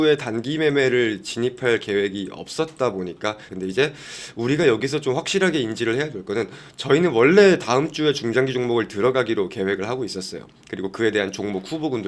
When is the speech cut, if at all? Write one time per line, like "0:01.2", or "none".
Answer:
0:03.4